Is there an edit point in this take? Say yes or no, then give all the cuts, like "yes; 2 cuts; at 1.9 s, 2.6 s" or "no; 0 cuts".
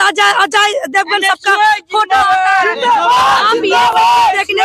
no; 0 cuts